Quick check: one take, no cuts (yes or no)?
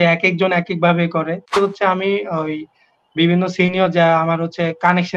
no